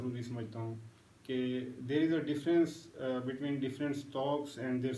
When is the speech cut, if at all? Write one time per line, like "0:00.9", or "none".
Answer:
none